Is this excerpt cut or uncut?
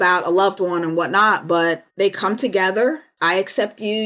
cut